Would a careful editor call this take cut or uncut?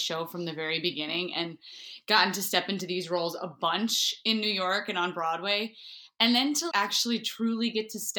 uncut